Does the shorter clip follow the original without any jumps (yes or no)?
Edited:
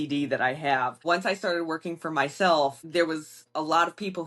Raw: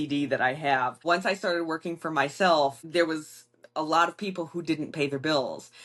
no